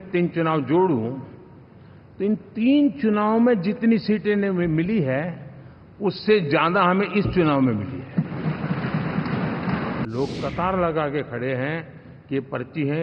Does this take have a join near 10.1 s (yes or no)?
yes